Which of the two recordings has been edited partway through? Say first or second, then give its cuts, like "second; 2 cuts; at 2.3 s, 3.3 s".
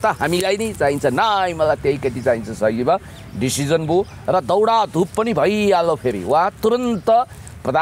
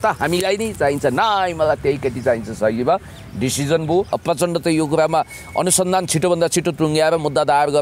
second; 1 cut; at 4.1 s